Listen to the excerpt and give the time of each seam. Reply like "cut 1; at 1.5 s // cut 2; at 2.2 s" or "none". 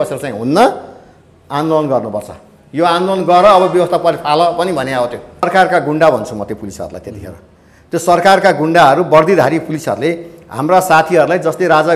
cut 1; at 5.4 s